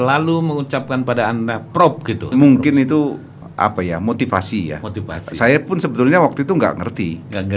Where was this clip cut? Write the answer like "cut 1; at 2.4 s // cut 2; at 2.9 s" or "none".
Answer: cut 1; at 2.3 s // cut 2; at 3.4 s